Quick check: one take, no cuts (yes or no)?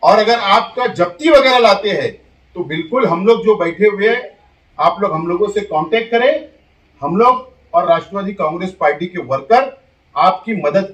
yes